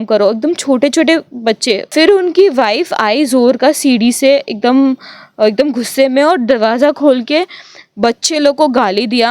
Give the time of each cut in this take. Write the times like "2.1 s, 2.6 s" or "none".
1.9 s